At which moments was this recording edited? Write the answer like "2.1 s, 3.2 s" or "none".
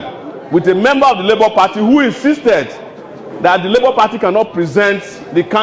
none